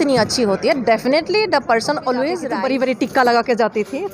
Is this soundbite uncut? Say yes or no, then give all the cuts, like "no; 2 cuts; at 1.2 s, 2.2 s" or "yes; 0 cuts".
no; 1 cut; at 2.5 s